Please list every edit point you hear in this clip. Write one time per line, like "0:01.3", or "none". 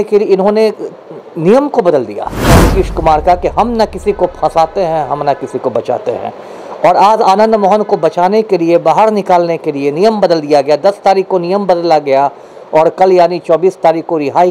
0:02.6